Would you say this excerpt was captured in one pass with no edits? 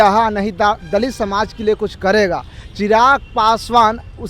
yes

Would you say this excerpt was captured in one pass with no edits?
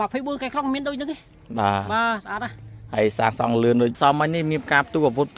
no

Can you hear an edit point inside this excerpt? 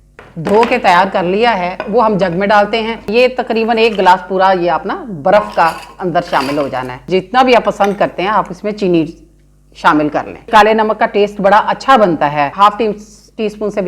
yes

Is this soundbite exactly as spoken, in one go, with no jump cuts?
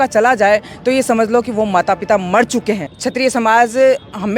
no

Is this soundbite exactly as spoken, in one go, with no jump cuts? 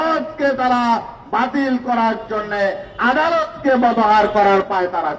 yes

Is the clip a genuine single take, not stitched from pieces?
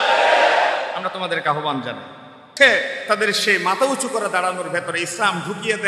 no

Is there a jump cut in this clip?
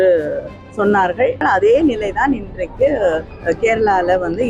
yes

